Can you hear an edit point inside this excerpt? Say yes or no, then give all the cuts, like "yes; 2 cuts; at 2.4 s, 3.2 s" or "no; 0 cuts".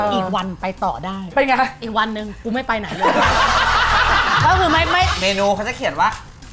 yes; 2 cuts; at 1.2 s, 5.2 s